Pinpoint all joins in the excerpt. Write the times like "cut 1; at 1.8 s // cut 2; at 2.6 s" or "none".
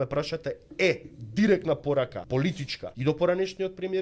cut 1; at 2.6 s